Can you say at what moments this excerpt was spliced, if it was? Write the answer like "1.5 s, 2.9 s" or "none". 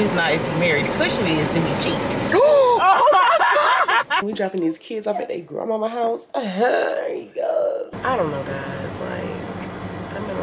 4.2 s, 7.9 s